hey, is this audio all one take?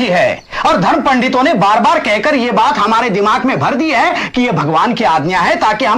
yes; 0 cuts

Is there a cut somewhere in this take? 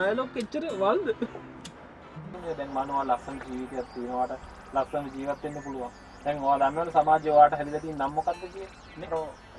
yes; 1 cut; at 2.4 s

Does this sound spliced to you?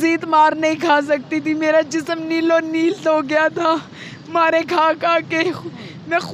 no; 0 cuts

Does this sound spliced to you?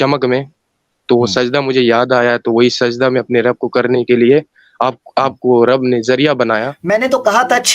yes; 1 cut; at 6.7 s

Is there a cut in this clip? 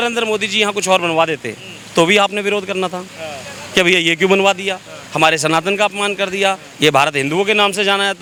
no; 0 cuts

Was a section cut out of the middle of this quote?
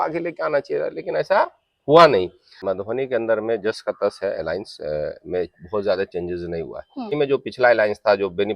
yes; 2 cuts; at 2.7 s, 7.2 s

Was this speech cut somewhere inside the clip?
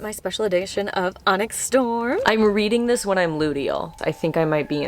yes; 1 cut; at 2.2 s

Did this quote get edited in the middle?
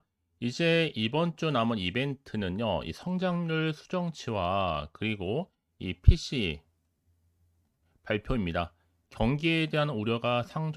no; 0 cuts

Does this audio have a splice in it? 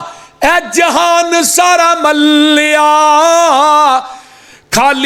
no; 0 cuts

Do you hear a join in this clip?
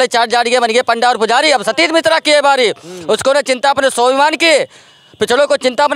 no; 0 cuts

